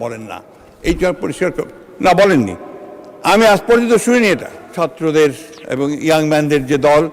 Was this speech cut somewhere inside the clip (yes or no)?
yes